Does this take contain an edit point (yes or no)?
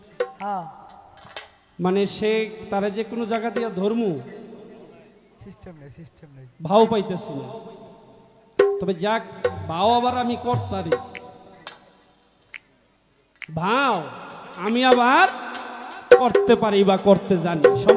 no